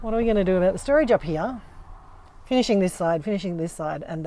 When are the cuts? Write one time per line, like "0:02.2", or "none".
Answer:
none